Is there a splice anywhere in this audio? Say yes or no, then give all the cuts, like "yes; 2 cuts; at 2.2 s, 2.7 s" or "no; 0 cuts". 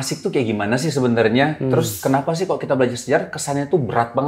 no; 0 cuts